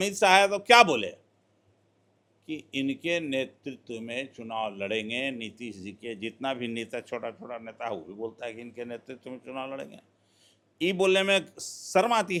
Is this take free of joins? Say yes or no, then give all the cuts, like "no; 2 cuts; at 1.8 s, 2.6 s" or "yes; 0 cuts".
yes; 0 cuts